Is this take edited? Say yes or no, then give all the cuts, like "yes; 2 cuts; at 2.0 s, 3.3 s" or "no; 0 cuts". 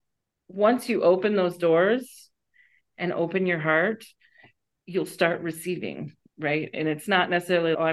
no; 0 cuts